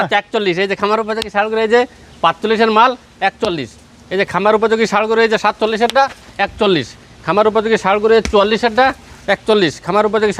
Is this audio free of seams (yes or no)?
yes